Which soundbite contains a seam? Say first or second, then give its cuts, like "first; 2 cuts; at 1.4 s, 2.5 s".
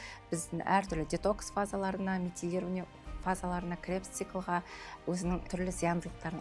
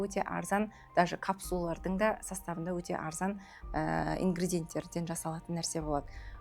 first; 1 cut; at 5.5 s